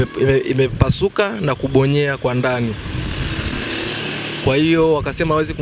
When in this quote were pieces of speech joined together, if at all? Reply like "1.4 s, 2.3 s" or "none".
none